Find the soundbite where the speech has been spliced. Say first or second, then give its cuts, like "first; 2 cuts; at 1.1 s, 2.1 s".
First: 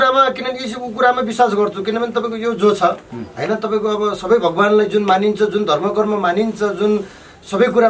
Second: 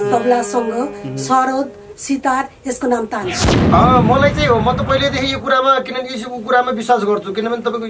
second; 1 cut; at 3.6 s